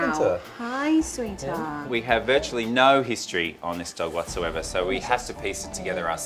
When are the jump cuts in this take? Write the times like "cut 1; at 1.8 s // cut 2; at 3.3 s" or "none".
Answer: cut 1; at 1.8 s